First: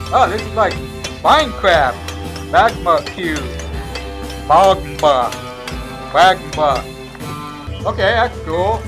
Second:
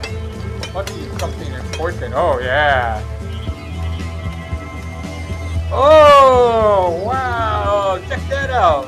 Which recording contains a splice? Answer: first; 1 cut; at 7.6 s

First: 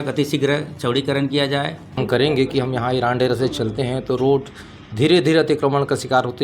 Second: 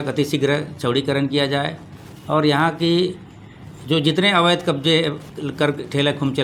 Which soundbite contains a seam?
first; 1 cut; at 2.0 s

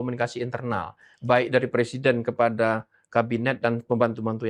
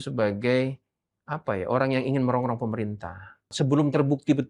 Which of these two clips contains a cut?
second; 1 cut; at 3.5 s

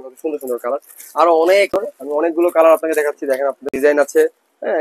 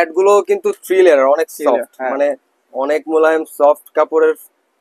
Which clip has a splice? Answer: first; 2 cuts; at 1.7 s, 3.7 s

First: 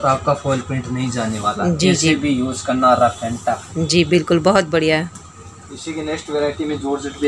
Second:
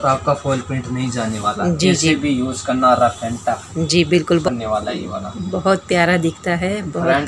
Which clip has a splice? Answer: second; 1 cut; at 4.4 s

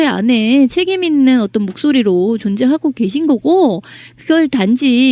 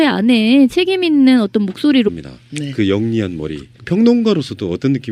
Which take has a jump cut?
first; 1 cut; at 2.1 s

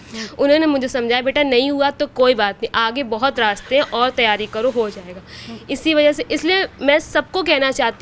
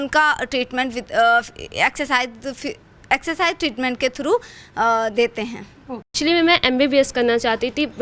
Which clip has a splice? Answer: second; 1 cut; at 6.1 s

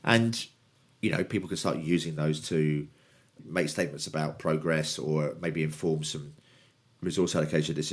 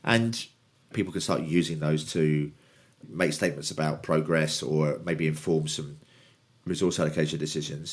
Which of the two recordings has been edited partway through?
second; 1 cut; at 0.9 s

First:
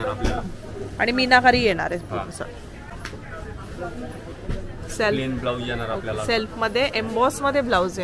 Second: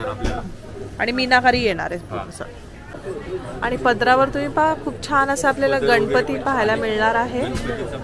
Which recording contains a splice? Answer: second; 1 cut; at 2.9 s

